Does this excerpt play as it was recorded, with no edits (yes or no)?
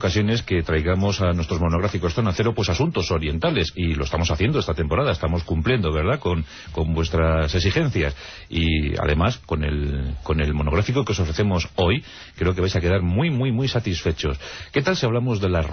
yes